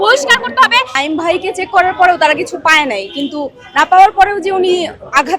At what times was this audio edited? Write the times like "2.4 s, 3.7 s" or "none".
0.9 s